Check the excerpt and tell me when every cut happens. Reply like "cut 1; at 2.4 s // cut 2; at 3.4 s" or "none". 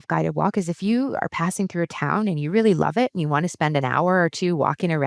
none